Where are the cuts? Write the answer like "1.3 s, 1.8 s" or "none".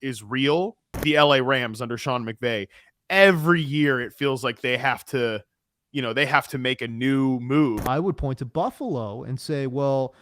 1.0 s, 7.8 s